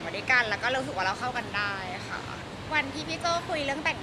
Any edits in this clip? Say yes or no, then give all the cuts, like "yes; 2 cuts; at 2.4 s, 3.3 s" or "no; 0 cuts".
yes; 1 cut; at 2.4 s